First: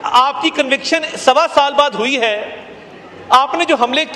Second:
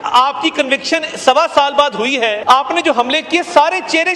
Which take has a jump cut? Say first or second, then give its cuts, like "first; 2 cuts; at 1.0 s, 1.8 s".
second; 1 cut; at 2.4 s